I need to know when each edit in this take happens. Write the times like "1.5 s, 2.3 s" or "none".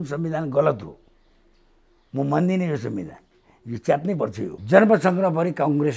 4.5 s